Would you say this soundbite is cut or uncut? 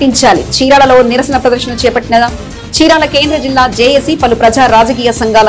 uncut